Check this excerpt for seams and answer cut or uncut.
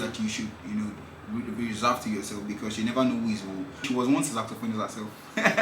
cut